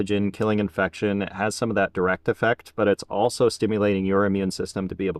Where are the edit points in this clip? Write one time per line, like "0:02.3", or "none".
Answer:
none